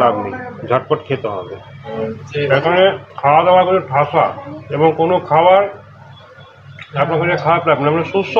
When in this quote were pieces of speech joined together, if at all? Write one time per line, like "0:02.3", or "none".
0:01.8